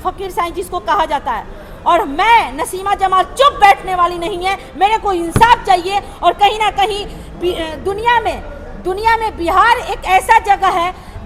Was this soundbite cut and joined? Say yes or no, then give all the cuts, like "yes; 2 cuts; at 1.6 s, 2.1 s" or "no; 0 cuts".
no; 0 cuts